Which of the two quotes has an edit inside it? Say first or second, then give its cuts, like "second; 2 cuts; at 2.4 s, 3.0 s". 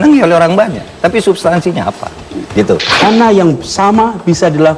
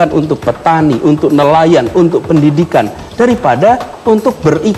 first; 1 cut; at 3.0 s